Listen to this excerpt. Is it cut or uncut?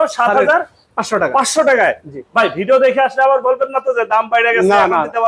uncut